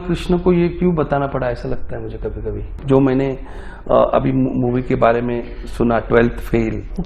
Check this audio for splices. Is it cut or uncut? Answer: cut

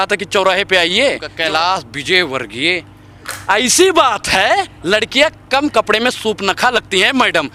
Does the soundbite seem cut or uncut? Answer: cut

